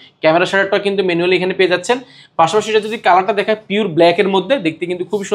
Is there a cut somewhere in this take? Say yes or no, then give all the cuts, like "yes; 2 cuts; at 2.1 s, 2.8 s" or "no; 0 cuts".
no; 0 cuts